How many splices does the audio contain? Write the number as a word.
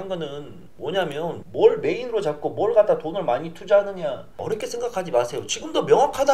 two